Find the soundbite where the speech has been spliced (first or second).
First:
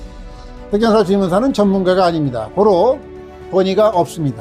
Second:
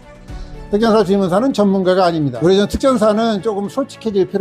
second